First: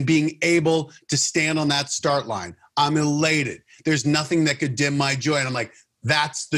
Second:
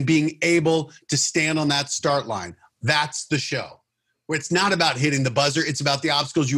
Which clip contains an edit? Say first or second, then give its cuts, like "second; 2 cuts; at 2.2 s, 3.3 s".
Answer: second; 1 cut; at 2.6 s